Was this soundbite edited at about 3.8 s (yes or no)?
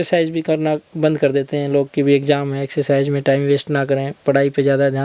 no